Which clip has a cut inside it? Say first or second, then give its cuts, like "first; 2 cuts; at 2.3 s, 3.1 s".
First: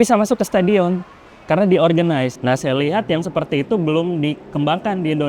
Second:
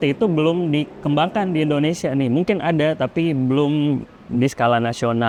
first; 1 cut; at 2.3 s